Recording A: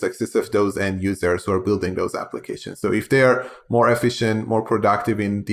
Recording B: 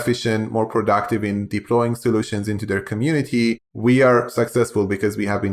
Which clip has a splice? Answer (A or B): B